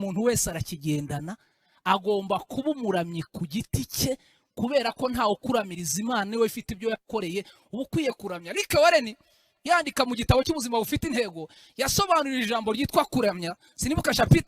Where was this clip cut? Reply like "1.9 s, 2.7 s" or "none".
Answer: none